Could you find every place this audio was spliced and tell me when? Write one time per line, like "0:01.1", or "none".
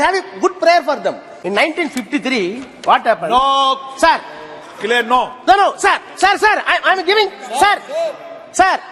0:01.3